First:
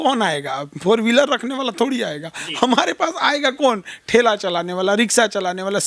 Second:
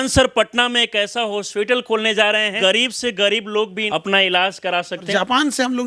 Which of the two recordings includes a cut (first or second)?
second